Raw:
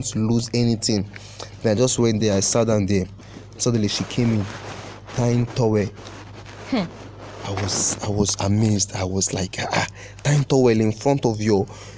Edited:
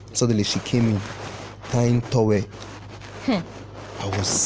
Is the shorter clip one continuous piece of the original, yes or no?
yes